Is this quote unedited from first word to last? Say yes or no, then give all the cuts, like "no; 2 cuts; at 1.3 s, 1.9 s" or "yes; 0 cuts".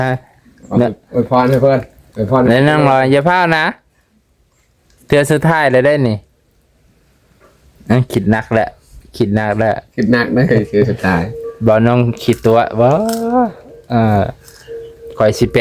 yes; 0 cuts